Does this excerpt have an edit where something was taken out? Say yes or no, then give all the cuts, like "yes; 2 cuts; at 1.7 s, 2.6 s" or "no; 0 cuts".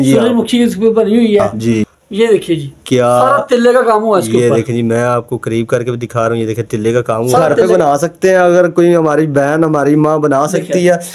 yes; 2 cuts; at 1.9 s, 7.5 s